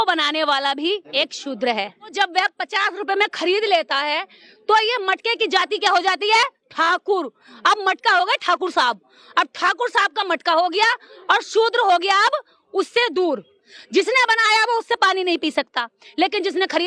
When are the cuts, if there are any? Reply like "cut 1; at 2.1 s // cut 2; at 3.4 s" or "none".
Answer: cut 1; at 1.1 s // cut 2; at 2.1 s